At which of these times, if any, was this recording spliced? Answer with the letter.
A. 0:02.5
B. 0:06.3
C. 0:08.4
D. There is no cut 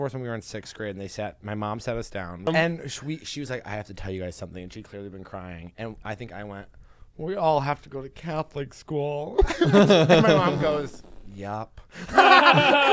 A